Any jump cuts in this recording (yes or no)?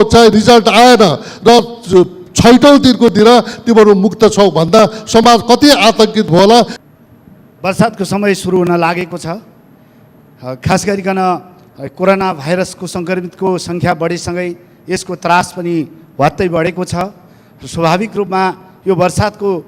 yes